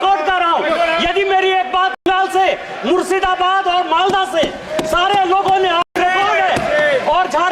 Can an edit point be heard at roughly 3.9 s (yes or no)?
no